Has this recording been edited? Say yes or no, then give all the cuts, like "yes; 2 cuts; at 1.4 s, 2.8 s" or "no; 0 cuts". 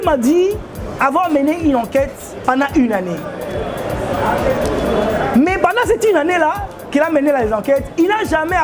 no; 0 cuts